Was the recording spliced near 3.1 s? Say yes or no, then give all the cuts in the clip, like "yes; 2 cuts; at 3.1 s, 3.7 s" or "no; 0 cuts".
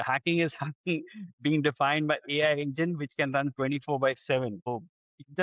no; 0 cuts